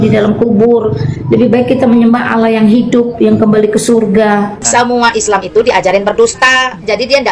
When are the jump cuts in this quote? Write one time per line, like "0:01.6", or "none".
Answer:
0:04.6